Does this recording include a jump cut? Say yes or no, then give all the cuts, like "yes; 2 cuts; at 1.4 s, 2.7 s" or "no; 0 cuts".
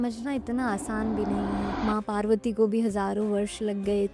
yes; 1 cut; at 1.7 s